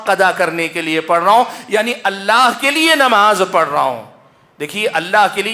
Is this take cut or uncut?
uncut